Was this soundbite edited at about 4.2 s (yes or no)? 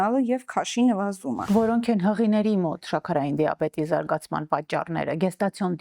no